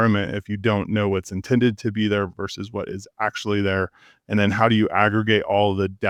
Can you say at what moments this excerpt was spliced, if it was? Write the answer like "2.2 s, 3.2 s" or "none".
none